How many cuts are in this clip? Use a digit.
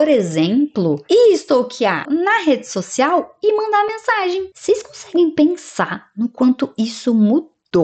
2